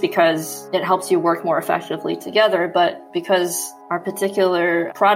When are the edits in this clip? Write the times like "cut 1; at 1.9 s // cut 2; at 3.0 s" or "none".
cut 1; at 3.0 s